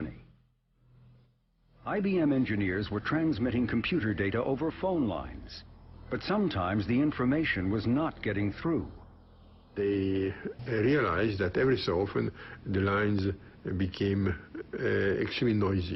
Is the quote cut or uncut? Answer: uncut